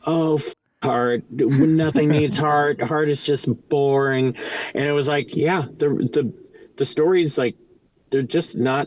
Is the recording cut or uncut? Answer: uncut